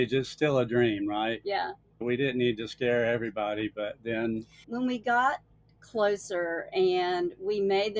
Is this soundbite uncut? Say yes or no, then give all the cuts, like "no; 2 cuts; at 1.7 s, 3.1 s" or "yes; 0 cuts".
no; 2 cuts; at 2.0 s, 4.6 s